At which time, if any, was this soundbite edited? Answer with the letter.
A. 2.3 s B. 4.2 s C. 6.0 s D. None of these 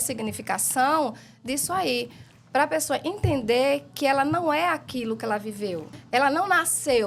C